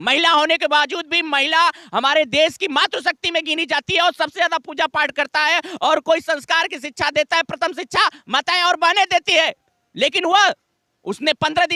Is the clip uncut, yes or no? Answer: yes